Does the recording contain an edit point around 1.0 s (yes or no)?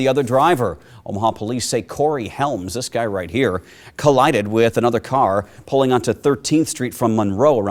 no